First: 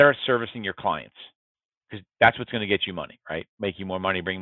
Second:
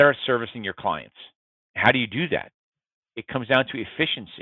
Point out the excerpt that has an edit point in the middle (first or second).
second